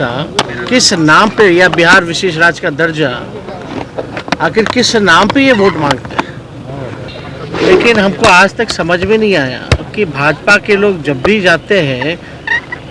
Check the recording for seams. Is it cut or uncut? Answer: cut